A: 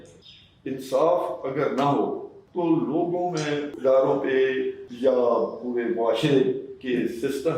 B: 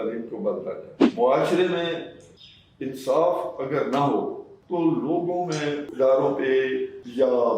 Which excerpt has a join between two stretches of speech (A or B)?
B